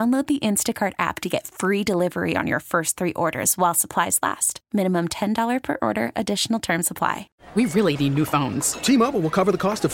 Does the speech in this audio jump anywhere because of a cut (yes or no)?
yes